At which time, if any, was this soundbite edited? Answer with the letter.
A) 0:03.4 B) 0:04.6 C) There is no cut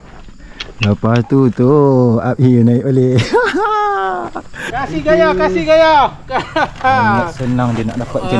B